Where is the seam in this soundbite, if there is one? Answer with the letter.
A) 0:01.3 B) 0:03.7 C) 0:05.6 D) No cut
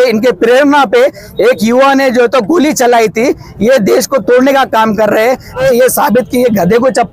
C